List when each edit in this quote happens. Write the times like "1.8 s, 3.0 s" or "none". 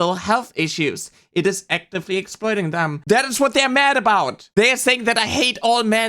3.0 s